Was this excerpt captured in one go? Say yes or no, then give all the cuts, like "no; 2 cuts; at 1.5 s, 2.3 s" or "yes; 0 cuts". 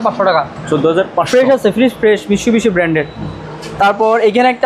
yes; 0 cuts